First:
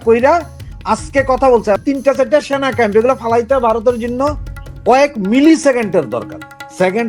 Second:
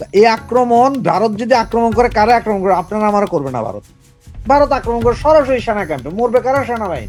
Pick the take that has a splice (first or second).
first